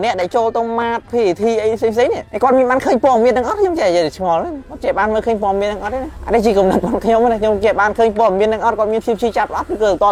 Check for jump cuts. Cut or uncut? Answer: uncut